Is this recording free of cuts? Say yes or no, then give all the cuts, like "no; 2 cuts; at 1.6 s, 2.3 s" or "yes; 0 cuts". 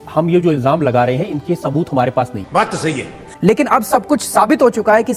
yes; 0 cuts